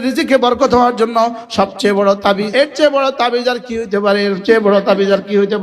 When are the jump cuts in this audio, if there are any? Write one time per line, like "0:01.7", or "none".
0:02.5